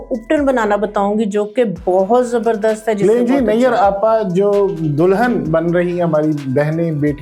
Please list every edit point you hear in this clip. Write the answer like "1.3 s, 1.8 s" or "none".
none